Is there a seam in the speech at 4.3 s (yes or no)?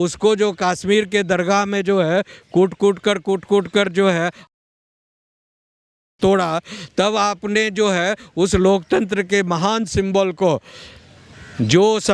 no